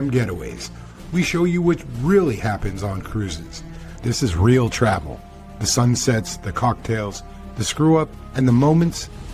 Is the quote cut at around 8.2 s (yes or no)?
yes